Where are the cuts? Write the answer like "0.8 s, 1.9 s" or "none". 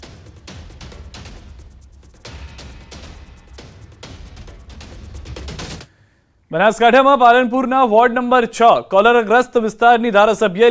8.0 s